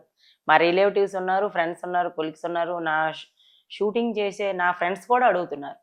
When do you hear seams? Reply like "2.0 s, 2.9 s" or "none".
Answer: none